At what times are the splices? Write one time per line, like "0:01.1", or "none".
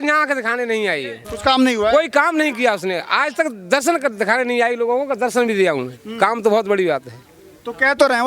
none